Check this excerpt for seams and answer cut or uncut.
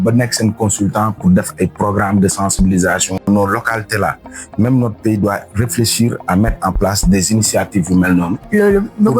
cut